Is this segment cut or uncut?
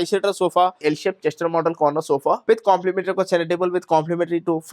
cut